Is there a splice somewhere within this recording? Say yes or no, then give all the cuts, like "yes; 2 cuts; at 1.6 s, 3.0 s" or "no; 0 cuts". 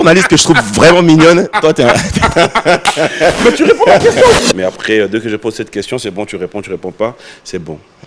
yes; 1 cut; at 4.4 s